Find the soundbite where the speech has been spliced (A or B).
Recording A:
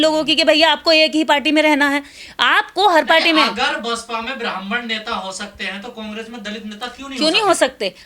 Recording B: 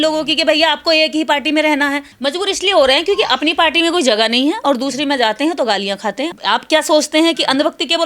B